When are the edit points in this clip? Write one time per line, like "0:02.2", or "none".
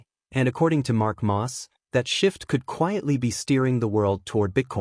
none